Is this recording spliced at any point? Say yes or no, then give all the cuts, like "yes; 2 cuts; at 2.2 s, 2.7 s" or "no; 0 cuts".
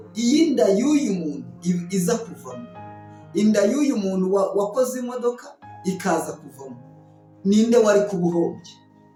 no; 0 cuts